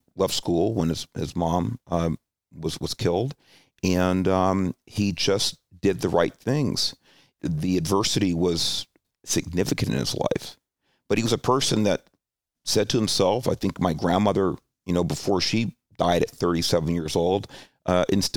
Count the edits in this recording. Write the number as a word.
three